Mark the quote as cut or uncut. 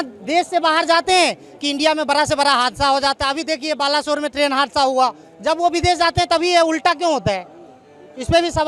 uncut